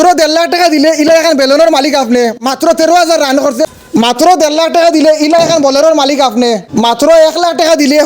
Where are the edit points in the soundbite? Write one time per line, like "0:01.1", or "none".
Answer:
0:03.7
0:06.6